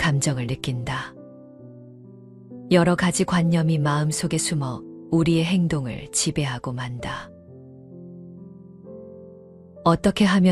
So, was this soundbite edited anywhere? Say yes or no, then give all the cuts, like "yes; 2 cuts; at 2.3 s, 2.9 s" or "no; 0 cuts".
no; 0 cuts